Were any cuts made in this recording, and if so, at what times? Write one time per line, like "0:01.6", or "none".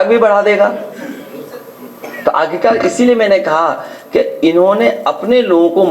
none